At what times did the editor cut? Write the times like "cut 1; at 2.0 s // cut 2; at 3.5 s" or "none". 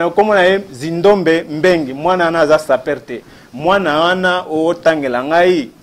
none